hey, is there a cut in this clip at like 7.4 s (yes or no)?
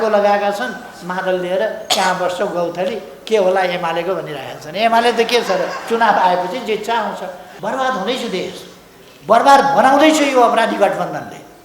yes